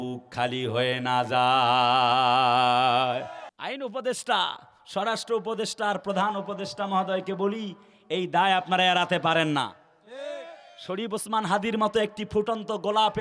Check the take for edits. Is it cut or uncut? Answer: cut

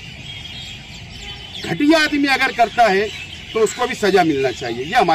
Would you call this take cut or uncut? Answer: uncut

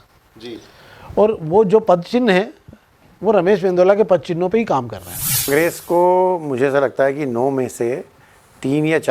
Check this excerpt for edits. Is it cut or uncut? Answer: cut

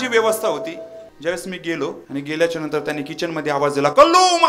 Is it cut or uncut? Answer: cut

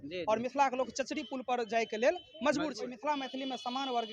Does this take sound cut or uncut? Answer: cut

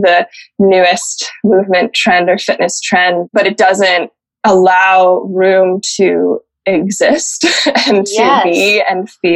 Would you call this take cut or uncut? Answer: cut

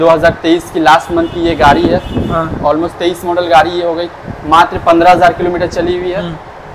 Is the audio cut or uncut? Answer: uncut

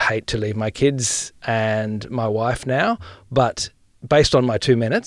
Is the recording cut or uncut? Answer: cut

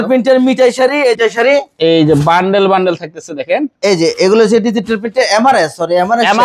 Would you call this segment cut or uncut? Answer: cut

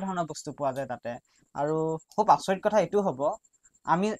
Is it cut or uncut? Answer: cut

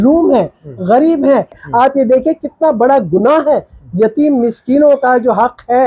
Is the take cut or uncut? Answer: cut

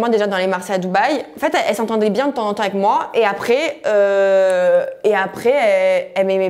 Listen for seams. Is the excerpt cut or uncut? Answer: uncut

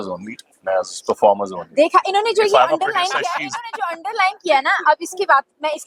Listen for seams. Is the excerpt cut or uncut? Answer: uncut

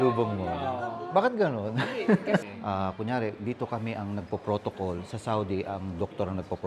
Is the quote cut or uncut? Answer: cut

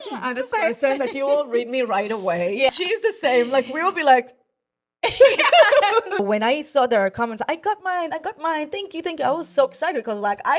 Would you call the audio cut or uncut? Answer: cut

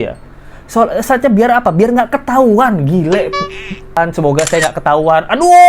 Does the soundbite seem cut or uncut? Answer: cut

